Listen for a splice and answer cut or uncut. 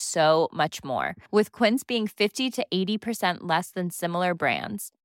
uncut